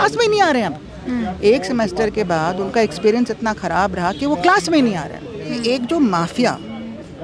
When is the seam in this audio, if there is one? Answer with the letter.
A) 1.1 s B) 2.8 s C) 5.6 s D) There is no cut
C